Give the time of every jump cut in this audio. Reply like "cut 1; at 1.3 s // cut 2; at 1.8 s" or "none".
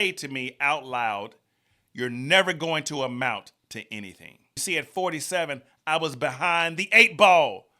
cut 1; at 4.6 s